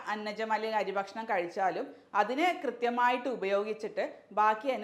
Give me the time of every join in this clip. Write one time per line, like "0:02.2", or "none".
none